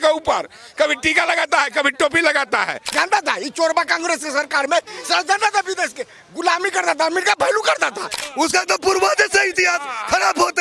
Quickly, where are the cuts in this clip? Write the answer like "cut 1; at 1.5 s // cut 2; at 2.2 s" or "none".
cut 1; at 2.9 s // cut 2; at 8.1 s